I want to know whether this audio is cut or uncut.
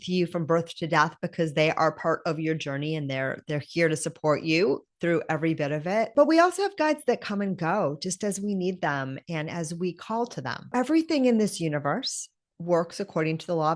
cut